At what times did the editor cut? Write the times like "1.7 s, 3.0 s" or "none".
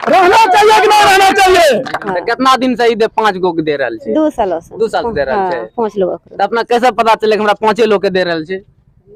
2.1 s